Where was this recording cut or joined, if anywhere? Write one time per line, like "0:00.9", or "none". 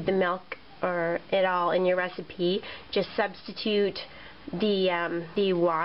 0:03.0